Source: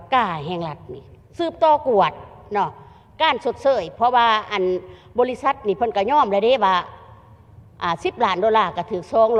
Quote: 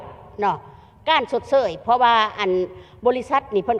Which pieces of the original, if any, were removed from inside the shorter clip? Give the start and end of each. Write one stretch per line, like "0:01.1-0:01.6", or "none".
none